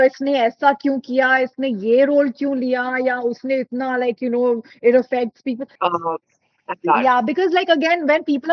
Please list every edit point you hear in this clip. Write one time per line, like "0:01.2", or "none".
0:05.7